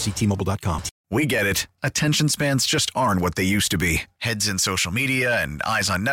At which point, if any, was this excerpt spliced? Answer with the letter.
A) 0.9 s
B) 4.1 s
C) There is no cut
A